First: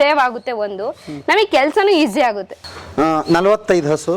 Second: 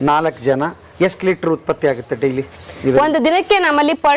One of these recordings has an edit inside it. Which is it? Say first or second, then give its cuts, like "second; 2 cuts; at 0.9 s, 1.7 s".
first; 1 cut; at 2.6 s